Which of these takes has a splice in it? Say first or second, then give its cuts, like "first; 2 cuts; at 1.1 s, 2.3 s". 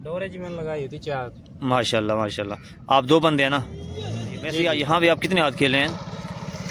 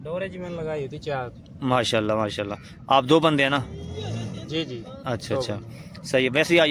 first; 1 cut; at 4.6 s